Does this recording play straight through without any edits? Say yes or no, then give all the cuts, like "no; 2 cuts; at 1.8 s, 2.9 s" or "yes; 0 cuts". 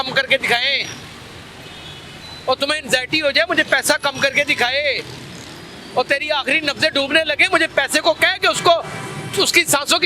yes; 0 cuts